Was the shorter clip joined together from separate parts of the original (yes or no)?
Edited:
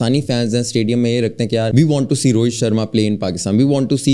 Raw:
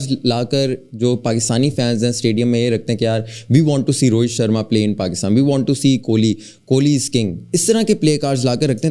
yes